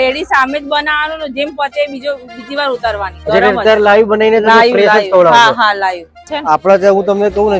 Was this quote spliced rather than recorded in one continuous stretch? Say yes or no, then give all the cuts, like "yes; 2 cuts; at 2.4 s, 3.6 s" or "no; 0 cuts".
yes; 1 cut; at 6.3 s